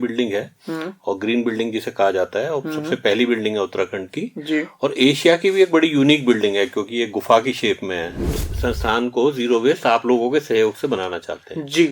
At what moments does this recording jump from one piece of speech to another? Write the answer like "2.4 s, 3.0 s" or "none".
8.4 s